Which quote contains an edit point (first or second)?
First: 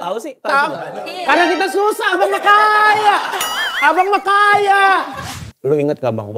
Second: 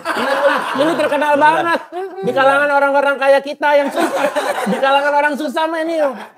first